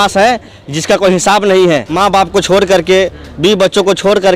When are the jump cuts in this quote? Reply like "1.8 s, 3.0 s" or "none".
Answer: 1.9 s